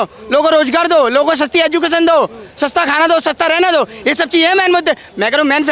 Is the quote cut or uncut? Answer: uncut